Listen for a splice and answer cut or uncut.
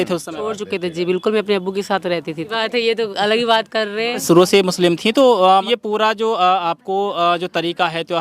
cut